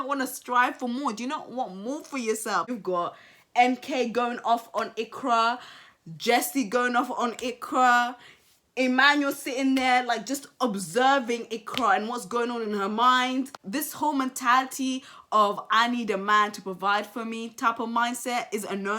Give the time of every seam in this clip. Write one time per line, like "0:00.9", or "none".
0:02.7
0:13.6